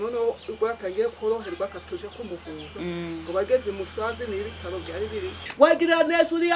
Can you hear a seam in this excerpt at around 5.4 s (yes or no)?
yes